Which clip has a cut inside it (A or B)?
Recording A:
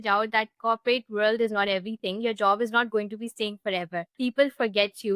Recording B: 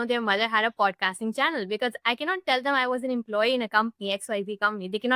A